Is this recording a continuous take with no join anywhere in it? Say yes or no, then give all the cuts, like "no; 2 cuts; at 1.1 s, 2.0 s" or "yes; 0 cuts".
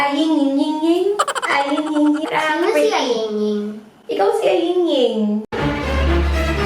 no; 2 cuts; at 2.2 s, 5.5 s